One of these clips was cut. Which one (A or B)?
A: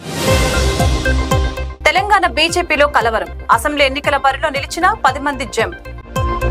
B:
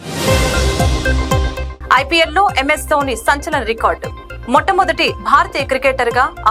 B